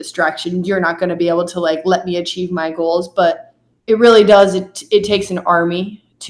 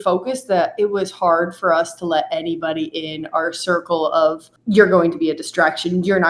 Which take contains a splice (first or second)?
second